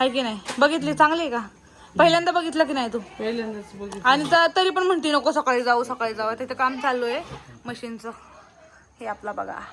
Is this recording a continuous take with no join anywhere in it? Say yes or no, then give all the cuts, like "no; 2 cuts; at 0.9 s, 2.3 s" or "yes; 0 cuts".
yes; 0 cuts